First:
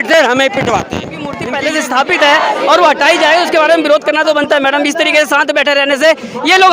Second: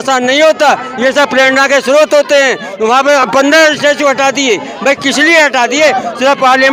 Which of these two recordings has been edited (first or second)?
first